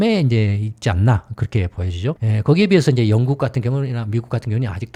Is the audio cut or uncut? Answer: uncut